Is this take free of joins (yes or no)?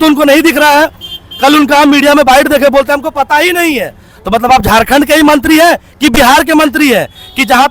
yes